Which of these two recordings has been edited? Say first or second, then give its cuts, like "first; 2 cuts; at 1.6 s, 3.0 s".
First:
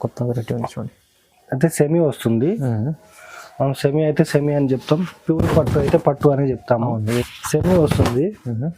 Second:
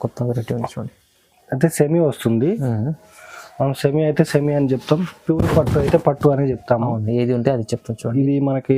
first; 1 cut; at 7.2 s